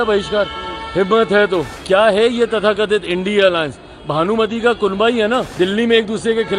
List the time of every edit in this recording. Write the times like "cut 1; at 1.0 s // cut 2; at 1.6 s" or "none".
cut 1; at 1.7 s // cut 2; at 5.5 s